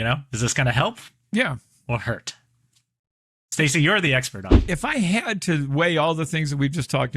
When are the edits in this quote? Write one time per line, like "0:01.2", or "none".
0:04.3